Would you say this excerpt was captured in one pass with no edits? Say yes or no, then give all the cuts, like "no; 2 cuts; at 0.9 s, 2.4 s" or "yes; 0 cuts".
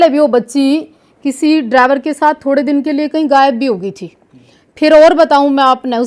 yes; 0 cuts